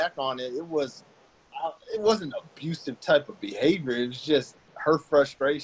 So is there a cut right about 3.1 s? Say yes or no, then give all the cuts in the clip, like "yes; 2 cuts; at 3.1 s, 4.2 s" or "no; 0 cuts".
no; 1 cut; at 1.5 s